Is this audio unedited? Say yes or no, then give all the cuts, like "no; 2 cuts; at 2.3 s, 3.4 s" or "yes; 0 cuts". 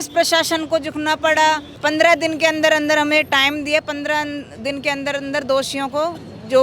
no; 1 cut; at 1.7 s